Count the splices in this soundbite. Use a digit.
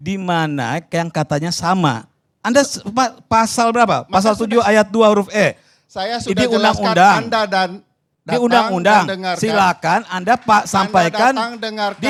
0